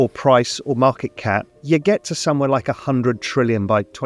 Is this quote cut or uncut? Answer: cut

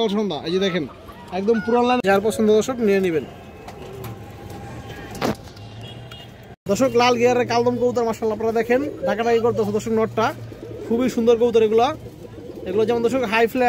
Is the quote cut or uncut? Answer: cut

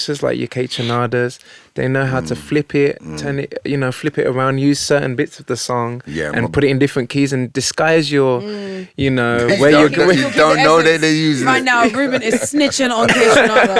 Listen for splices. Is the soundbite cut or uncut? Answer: uncut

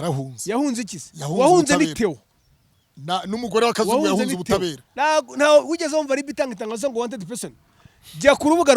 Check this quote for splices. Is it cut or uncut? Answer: uncut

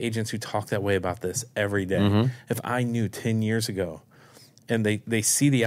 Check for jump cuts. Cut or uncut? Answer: uncut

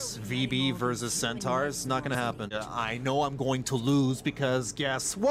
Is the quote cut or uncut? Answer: cut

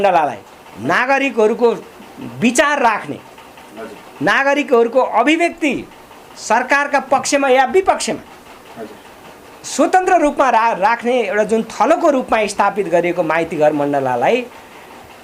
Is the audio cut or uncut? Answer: uncut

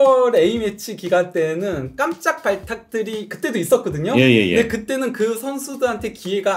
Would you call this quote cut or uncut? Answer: uncut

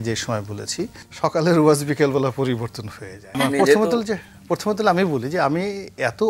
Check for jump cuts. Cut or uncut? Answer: cut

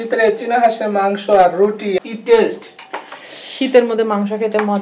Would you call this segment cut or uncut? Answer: cut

